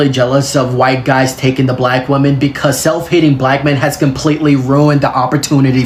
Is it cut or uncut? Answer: uncut